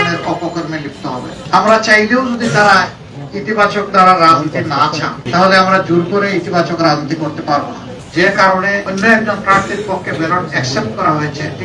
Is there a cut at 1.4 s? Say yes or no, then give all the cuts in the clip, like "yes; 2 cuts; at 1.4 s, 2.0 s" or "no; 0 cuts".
yes; 3 cuts; at 1.4 s, 5.2 s, 7.7 s